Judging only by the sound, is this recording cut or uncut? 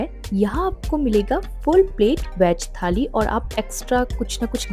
uncut